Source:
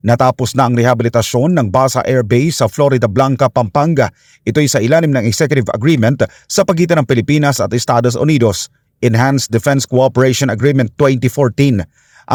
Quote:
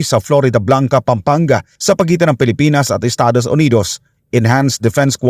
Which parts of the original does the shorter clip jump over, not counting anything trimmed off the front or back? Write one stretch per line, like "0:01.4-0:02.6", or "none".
0:04.2-0:06.4